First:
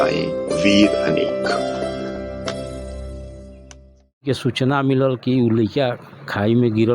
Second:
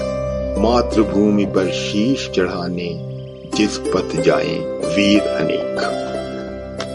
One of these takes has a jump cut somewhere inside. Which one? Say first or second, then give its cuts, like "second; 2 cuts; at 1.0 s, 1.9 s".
first; 1 cut; at 4.2 s